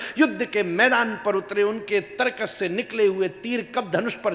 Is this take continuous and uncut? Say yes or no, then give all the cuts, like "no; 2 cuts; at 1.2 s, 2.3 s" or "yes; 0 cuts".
yes; 0 cuts